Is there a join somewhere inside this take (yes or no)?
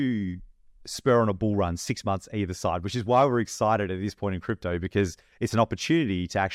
no